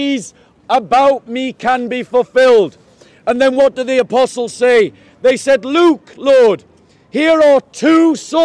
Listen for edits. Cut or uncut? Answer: uncut